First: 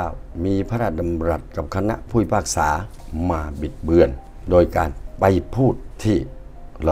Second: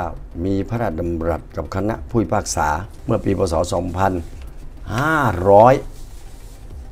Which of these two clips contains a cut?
first; 2 cuts; at 2.9 s, 5.9 s

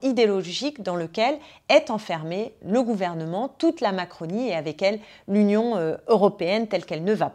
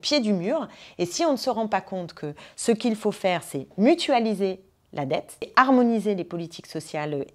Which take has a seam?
second; 1 cut; at 5.5 s

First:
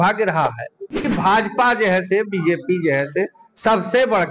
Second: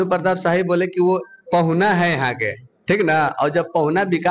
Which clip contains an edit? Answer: first; 1 cut; at 1.1 s

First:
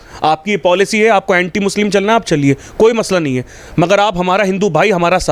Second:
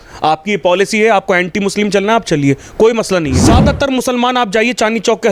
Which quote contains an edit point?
second; 1 cut; at 3.4 s

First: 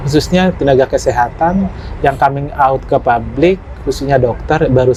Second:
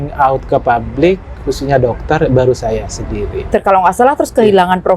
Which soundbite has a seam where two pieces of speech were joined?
second; 1 cut; at 3.5 s

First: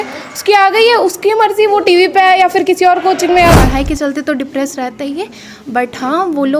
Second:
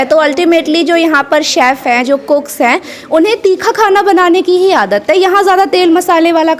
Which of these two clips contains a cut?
first; 1 cut; at 3.6 s

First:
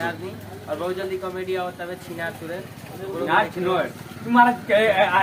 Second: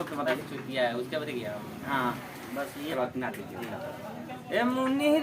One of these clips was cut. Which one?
second; 1 cut; at 2.9 s

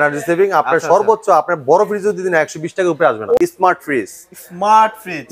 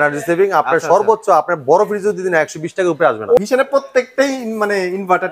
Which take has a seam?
first; 1 cut; at 3.4 s

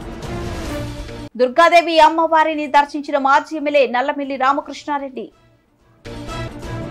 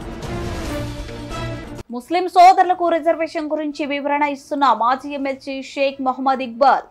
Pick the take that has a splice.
second; 1 cut; at 1.2 s

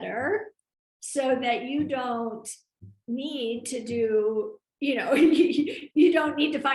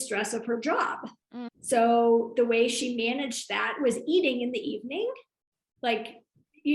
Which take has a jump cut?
second; 1 cut; at 1.5 s

